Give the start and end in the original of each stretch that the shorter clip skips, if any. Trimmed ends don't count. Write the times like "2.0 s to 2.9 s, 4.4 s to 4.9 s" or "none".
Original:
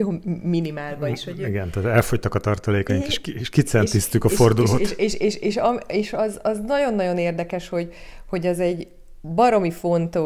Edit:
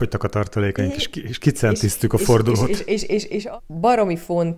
5.5 s to 9.0 s